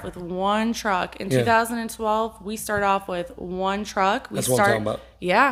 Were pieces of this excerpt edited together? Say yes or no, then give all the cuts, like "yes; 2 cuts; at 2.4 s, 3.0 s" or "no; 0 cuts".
no; 0 cuts